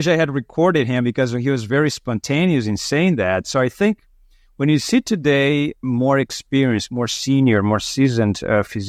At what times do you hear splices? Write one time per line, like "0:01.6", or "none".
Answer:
none